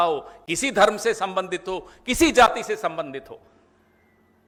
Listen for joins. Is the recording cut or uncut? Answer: uncut